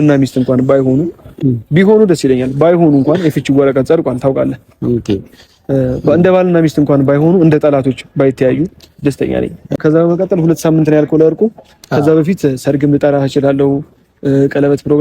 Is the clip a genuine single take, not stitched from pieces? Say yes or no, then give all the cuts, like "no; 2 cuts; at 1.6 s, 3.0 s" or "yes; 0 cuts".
no; 1 cut; at 9.8 s